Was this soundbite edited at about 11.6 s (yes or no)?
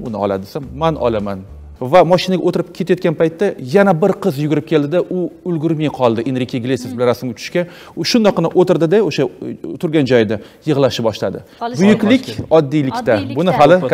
yes